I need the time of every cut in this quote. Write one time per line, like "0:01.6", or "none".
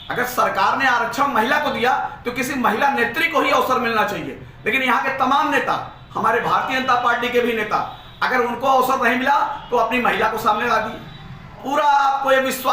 0:11.6

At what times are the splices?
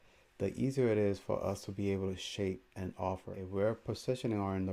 0:03.3

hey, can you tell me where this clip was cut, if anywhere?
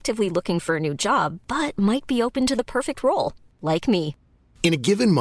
none

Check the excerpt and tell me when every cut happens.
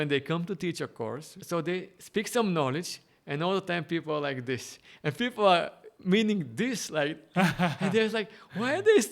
0:01.4

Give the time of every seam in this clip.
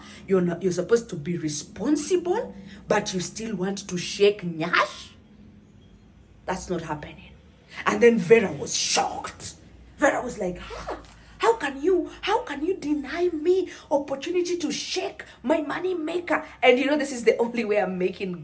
none

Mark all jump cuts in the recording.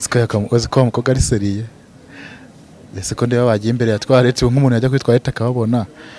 none

